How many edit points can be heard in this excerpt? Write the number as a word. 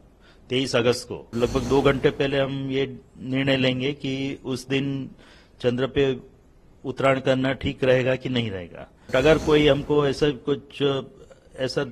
two